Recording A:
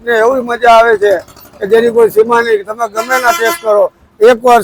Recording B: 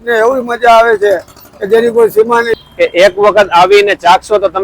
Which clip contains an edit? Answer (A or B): B